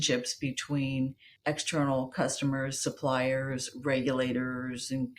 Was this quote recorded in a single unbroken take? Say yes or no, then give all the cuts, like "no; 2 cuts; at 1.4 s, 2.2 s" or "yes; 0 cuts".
no; 1 cut; at 1.3 s